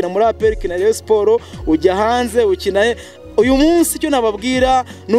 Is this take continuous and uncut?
yes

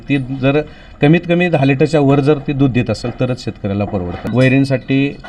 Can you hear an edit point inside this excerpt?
yes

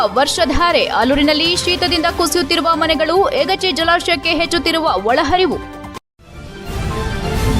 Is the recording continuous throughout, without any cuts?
no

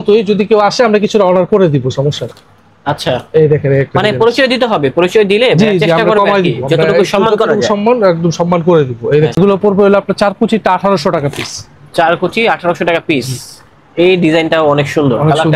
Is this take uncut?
no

